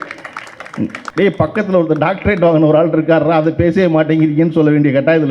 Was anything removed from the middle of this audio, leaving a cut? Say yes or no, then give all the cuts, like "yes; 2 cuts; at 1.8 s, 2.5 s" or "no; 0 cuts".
yes; 1 cut; at 1.0 s